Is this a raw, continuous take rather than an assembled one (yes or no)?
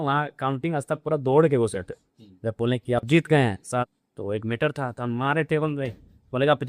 no